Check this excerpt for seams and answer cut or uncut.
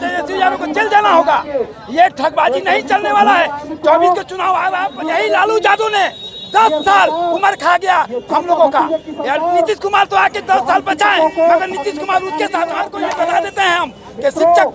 cut